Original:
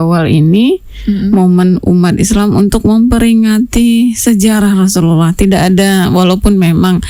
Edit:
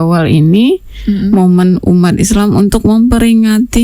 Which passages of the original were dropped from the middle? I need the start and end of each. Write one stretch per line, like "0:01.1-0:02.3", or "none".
none